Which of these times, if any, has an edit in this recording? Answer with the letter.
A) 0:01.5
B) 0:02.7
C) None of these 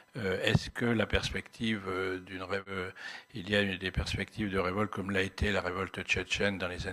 B